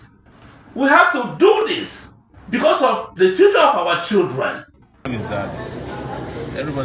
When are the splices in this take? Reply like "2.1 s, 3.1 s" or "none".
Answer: 5.1 s